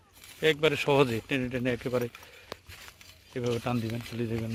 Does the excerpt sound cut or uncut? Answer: uncut